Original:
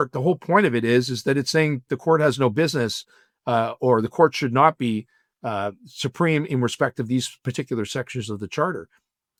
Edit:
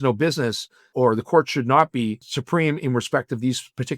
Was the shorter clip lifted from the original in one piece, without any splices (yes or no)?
no